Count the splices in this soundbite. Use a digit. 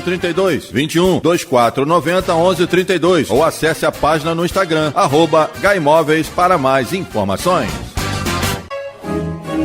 1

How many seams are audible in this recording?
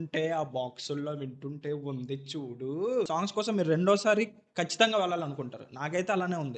1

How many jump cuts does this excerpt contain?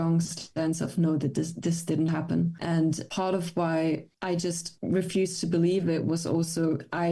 1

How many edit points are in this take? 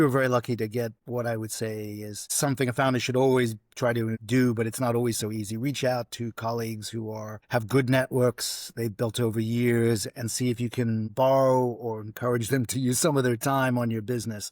3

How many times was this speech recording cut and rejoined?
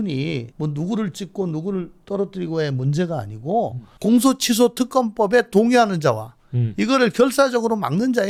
0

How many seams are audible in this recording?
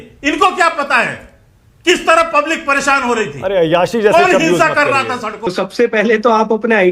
1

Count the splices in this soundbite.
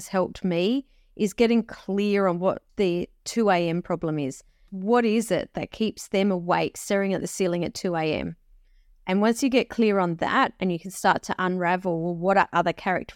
1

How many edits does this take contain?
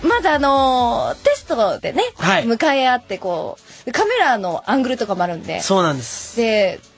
0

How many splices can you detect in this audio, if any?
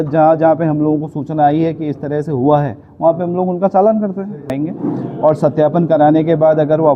1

